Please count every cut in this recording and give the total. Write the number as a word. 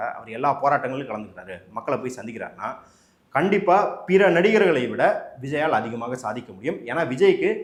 zero